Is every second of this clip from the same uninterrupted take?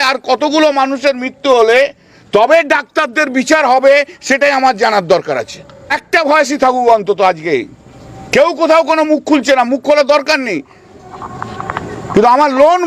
yes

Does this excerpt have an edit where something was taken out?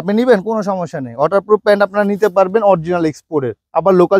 no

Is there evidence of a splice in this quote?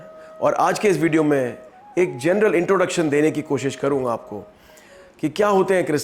no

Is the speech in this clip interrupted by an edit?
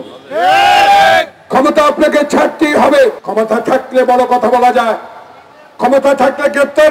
yes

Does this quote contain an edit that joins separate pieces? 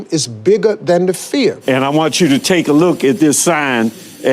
yes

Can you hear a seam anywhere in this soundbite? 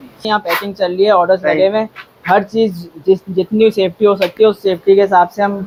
no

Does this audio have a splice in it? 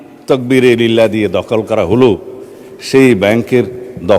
no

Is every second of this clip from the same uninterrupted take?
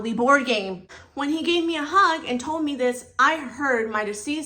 no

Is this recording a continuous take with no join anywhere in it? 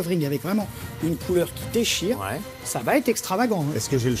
no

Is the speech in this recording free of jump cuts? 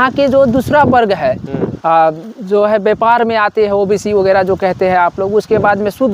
no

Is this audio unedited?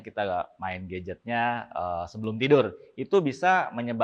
yes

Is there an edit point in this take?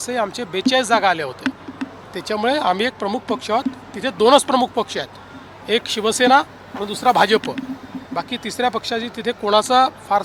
no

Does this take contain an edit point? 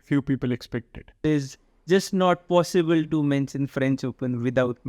yes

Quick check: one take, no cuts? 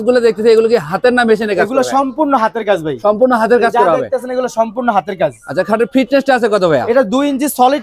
yes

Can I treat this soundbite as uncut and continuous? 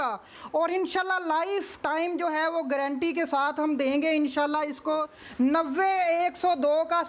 no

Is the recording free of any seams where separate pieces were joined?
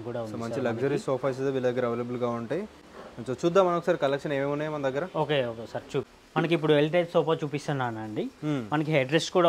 yes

